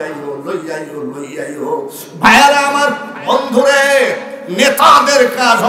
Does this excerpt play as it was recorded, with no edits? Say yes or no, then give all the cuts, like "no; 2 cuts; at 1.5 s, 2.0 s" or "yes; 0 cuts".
yes; 0 cuts